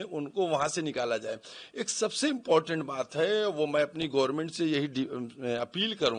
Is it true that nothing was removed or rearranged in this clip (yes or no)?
yes